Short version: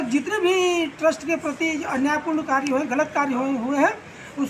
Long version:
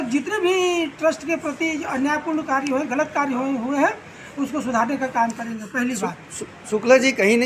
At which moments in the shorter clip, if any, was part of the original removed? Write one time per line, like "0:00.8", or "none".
none